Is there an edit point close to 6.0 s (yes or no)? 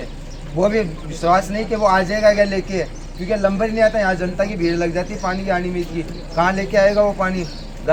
no